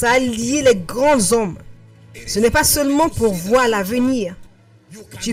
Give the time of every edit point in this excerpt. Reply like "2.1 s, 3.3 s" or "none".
none